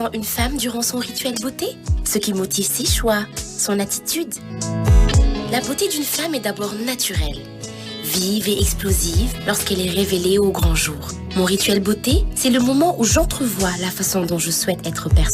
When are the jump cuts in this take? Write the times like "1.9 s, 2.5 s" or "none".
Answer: 5.1 s